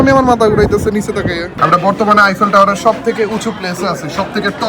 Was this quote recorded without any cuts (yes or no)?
no